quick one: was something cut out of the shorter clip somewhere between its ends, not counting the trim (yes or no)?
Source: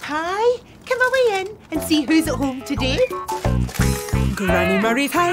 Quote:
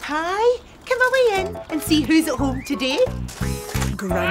yes